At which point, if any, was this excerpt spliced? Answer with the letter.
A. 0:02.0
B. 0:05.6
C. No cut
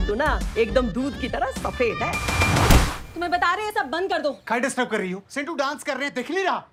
C